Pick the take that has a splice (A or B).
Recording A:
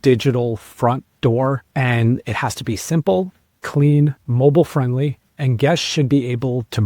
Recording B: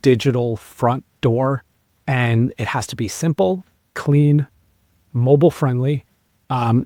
A